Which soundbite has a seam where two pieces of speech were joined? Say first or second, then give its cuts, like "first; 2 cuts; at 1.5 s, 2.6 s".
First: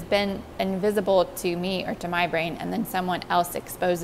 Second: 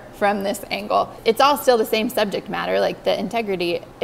second; 1 cut; at 1.1 s